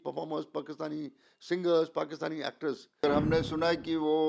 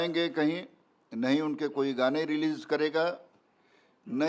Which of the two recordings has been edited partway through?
first; 1 cut; at 3.0 s

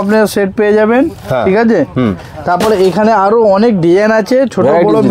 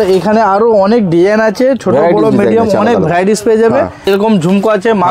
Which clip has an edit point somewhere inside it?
second; 1 cut; at 4.1 s

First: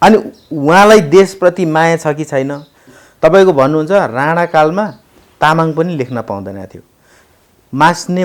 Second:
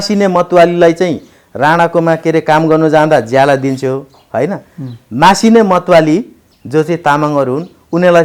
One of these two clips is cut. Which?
first; 1 cut; at 2.9 s

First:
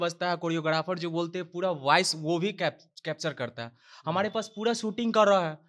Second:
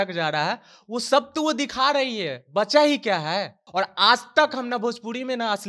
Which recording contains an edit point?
second; 1 cut; at 3.6 s

